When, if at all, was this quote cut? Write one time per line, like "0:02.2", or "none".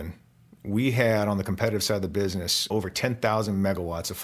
0:02.7